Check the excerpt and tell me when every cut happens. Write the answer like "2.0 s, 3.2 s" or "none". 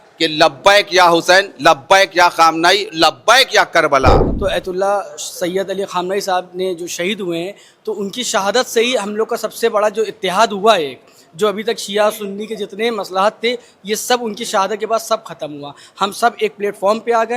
4.3 s